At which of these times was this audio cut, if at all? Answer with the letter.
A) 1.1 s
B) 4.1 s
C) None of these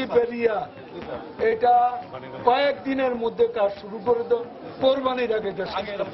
C